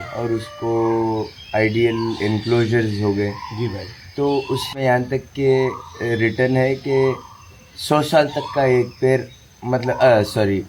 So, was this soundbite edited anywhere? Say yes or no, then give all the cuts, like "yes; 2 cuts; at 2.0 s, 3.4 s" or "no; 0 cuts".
yes; 1 cut; at 4.8 s